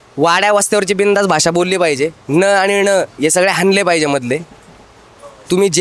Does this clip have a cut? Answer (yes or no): no